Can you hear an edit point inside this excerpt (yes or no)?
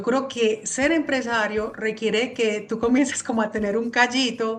no